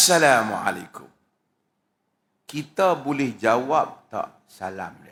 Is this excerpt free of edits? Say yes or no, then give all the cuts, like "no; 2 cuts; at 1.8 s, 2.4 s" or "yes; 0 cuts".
yes; 0 cuts